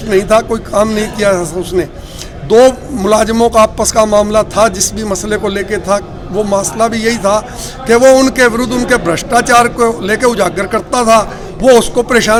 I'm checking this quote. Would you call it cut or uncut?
uncut